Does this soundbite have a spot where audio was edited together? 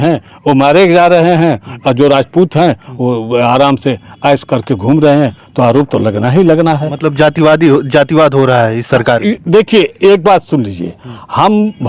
no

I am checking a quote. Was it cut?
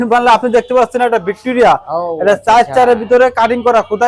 no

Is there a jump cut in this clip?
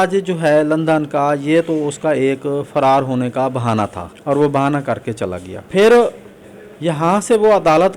no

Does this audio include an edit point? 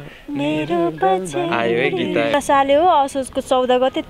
yes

